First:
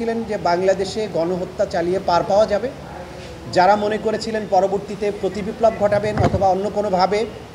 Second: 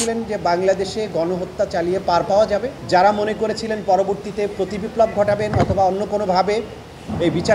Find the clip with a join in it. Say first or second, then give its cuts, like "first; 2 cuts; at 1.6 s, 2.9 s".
second; 1 cut; at 2.8 s